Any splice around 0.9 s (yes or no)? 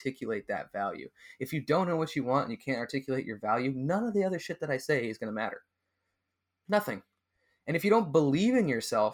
no